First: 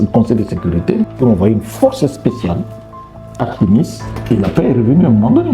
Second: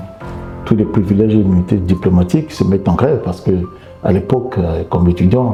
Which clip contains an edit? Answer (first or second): first